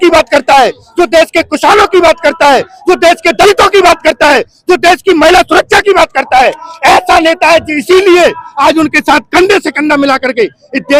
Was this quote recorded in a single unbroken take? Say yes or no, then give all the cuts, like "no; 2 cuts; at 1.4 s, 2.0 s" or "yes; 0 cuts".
yes; 0 cuts